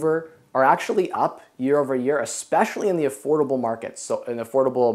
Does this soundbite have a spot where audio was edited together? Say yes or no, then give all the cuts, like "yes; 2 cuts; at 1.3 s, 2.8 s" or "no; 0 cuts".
no; 0 cuts